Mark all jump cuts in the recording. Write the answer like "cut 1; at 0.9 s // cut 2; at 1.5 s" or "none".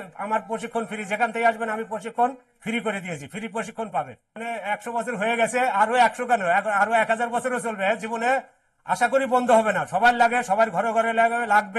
cut 1; at 4.4 s